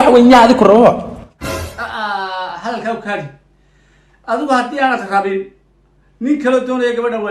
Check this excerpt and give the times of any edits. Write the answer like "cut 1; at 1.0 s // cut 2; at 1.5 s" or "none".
cut 1; at 1.1 s

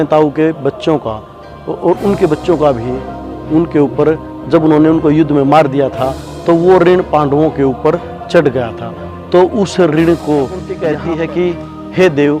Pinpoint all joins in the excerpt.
cut 1; at 10.6 s

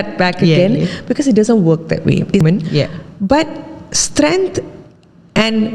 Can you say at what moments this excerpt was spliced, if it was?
cut 1; at 2.4 s

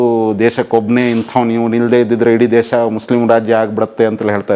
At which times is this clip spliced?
none

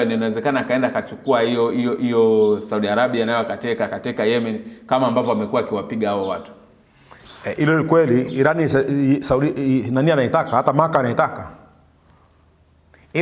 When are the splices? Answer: none

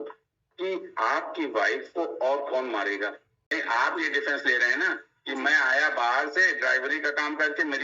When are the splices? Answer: cut 1; at 3.6 s

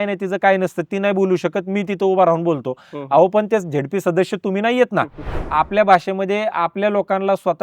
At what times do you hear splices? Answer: cut 1; at 5.4 s

